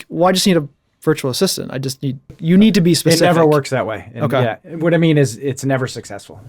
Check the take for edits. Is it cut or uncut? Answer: cut